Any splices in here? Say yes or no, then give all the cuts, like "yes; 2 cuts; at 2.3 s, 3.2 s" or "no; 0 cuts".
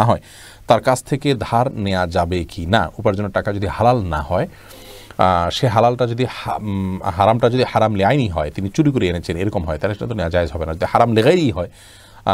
no; 0 cuts